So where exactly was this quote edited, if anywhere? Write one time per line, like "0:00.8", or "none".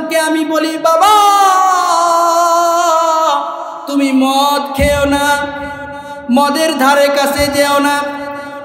0:03.8